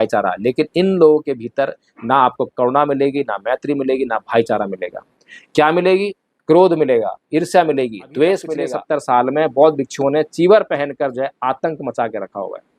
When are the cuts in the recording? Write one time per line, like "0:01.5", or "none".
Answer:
0:08.7